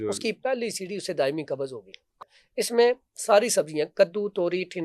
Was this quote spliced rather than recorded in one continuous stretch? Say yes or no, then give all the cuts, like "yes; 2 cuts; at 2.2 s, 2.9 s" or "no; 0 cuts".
yes; 1 cut; at 2.1 s